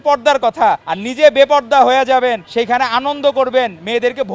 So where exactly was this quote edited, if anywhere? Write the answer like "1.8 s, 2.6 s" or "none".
0.9 s